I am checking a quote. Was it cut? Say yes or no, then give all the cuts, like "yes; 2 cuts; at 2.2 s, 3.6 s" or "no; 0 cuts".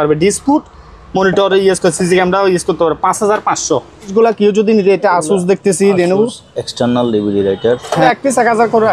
yes; 2 cuts; at 4.1 s, 8.0 s